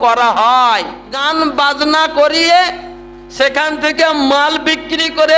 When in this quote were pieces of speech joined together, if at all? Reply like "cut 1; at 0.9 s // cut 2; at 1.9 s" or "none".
cut 1; at 1.1 s